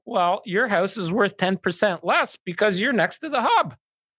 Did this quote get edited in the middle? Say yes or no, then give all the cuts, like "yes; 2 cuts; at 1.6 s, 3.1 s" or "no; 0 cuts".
no; 0 cuts